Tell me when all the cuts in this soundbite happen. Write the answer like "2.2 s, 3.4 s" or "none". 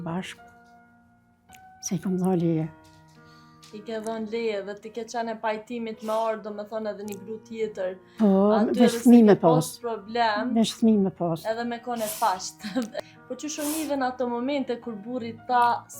12.9 s